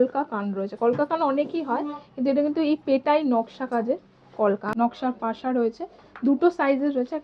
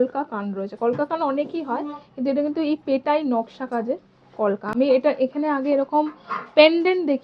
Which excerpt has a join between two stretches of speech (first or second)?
first